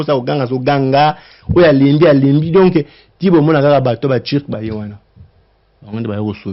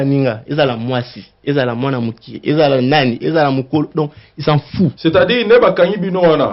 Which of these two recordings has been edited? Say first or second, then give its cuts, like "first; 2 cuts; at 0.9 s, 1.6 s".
second; 1 cut; at 5.0 s